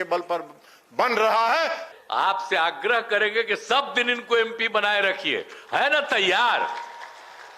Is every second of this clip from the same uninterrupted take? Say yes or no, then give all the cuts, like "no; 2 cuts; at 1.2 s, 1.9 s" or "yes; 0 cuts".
no; 1 cut; at 1.9 s